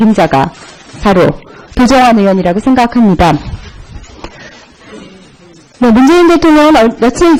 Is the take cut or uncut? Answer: uncut